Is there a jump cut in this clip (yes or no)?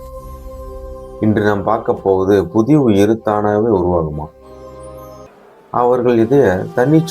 yes